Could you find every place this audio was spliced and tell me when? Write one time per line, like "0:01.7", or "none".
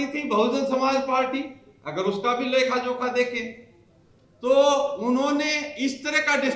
none